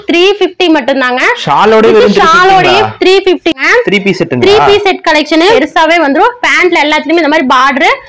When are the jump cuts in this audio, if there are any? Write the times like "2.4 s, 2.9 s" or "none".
3.5 s, 5.5 s